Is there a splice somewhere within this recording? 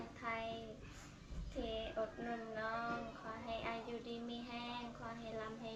no; 0 cuts

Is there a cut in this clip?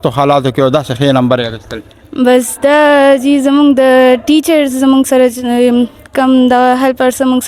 no; 0 cuts

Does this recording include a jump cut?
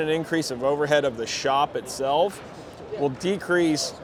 no; 0 cuts

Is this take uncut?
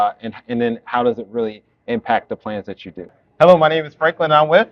no; 1 cut; at 3.2 s

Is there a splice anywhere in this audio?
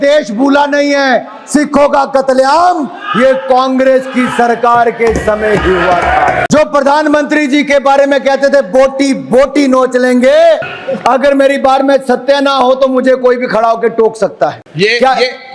yes; 3 cuts; at 6.4 s, 10.7 s, 14.6 s

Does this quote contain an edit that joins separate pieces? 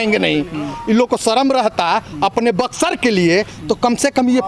no; 0 cuts

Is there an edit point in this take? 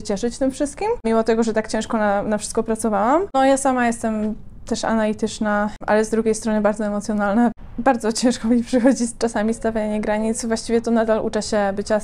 yes; 4 cuts; at 1.0 s, 3.3 s, 5.8 s, 7.5 s

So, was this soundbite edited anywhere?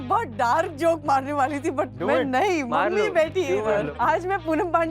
yes; 1 cut; at 3.9 s

